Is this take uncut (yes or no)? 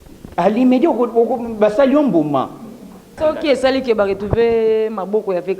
no